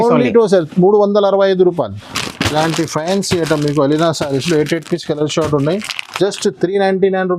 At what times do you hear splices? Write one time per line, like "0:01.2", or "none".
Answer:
0:02.0